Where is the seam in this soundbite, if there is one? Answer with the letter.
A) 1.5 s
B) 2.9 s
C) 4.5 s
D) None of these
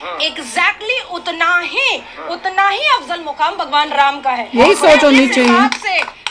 D